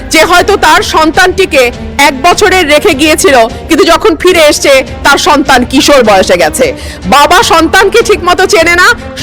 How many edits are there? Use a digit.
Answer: 0